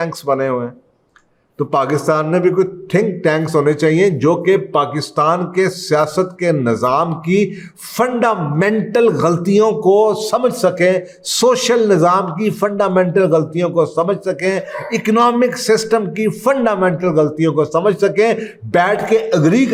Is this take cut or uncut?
uncut